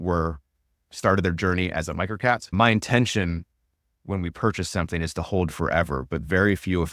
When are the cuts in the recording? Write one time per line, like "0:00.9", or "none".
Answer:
0:02.5